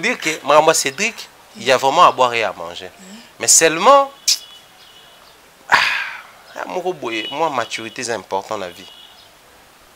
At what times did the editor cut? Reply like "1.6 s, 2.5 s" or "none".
none